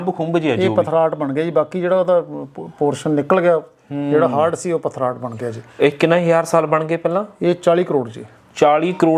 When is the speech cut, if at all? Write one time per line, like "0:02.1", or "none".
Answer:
none